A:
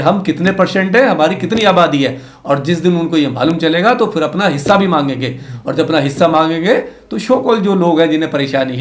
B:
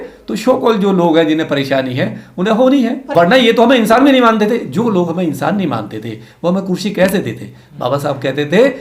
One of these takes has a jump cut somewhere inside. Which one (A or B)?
B